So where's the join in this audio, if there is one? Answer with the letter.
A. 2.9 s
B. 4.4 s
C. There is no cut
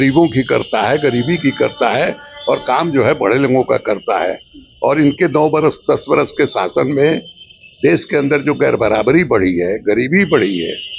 C